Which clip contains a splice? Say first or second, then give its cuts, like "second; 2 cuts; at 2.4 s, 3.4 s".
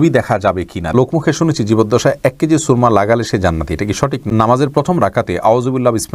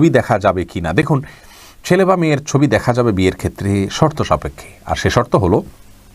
first; 2 cuts; at 0.9 s, 4.2 s